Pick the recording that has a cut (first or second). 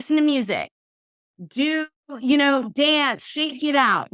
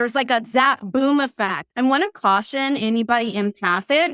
second